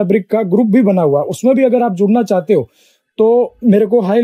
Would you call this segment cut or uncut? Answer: uncut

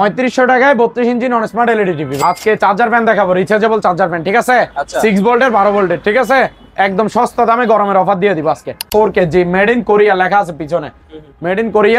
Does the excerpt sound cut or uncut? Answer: cut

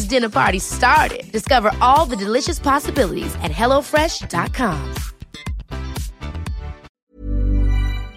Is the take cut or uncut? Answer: cut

